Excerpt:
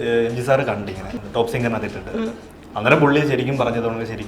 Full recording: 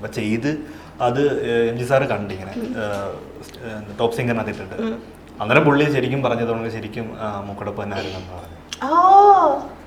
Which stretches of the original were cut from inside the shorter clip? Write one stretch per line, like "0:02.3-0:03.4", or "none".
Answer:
0:02.6-0:03.8